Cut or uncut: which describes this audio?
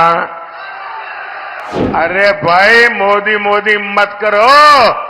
cut